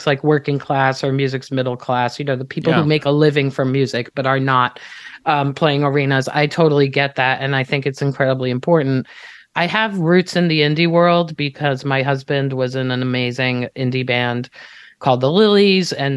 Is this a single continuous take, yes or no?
yes